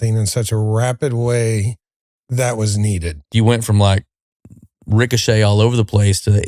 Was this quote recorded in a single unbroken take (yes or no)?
no